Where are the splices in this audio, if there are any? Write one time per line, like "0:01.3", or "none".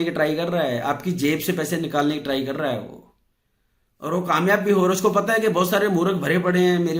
none